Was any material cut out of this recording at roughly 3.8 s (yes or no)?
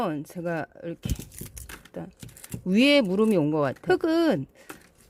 yes